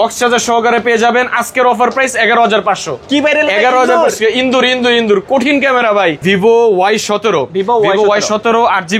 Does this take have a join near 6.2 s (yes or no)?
yes